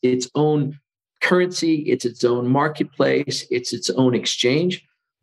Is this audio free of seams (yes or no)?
yes